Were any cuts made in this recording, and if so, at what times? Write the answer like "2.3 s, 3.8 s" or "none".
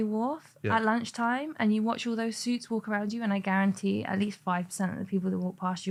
none